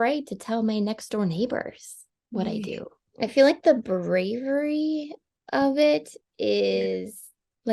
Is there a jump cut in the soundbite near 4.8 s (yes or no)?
no